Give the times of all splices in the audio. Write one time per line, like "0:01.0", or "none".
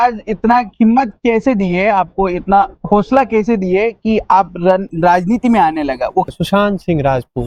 0:06.3